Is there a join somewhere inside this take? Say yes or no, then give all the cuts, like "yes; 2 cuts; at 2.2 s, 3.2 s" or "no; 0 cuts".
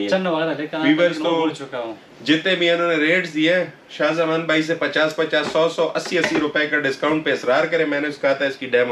no; 0 cuts